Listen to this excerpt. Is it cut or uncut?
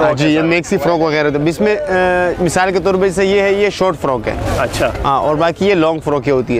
uncut